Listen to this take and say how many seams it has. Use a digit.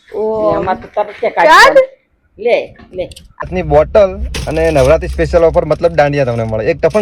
1